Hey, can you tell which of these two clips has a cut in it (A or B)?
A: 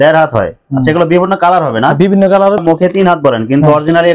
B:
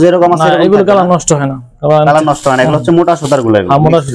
A